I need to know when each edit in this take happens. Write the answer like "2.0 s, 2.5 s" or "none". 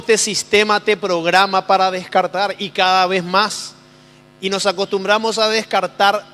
5.4 s